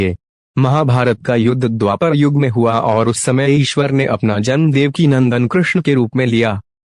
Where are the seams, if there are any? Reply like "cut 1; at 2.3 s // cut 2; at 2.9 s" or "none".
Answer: cut 1; at 5.8 s

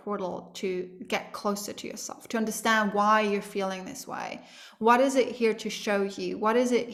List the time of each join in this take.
none

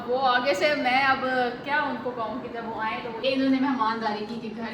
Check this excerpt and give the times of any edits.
cut 1; at 3.2 s

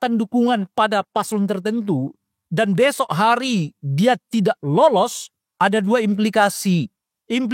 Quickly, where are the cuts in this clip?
none

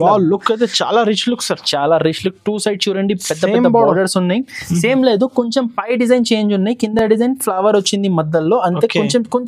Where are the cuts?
none

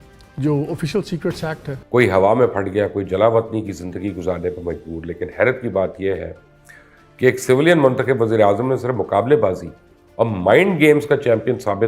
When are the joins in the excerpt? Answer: cut 1; at 1.7 s

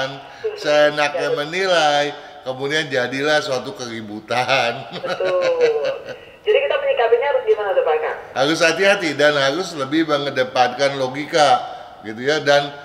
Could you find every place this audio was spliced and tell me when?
cut 1; at 8.2 s

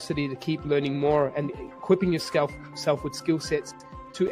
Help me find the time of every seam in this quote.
none

